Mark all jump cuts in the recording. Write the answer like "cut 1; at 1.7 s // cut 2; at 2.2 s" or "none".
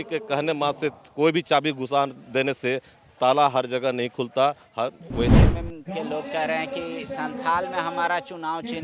cut 1; at 5.3 s